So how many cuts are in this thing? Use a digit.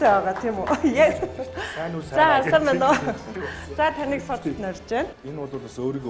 1